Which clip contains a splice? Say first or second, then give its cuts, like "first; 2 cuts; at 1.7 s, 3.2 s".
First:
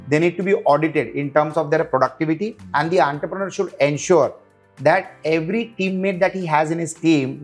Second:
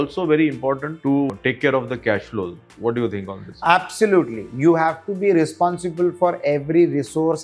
second; 2 cuts; at 1.3 s, 2.6 s